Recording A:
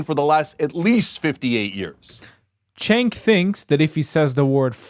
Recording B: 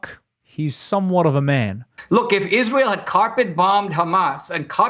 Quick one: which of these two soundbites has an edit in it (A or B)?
B